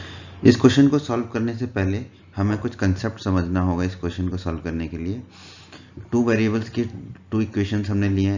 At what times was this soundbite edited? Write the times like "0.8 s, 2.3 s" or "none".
none